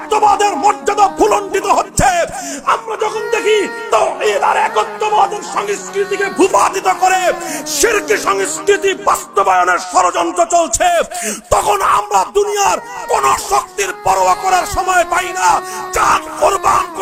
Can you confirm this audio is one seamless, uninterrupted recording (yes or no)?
yes